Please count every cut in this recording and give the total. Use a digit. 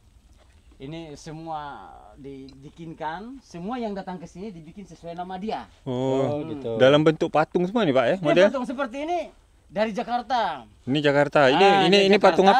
0